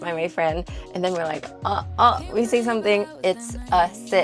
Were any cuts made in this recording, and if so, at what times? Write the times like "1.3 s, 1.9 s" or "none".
3.1 s

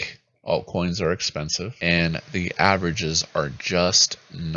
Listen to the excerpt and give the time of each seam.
1.7 s

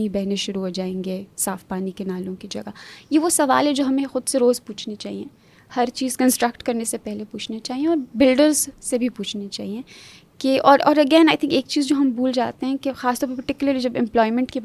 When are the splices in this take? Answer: none

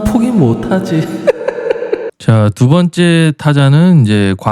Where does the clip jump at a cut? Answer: 2.1 s

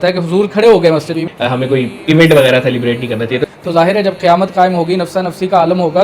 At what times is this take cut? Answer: 1.3 s, 3.4 s

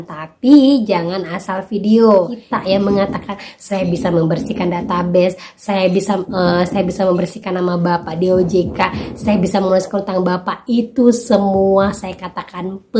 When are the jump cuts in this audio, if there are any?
2.4 s

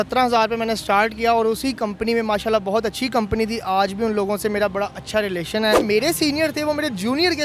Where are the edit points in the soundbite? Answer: 5.8 s

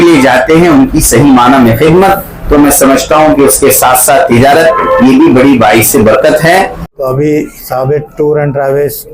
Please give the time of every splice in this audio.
6.8 s

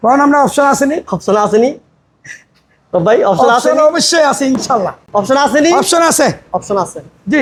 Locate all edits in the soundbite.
none

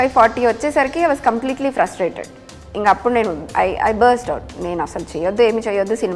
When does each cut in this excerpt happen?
none

